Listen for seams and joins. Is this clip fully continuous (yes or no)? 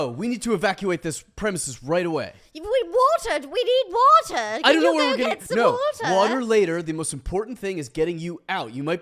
yes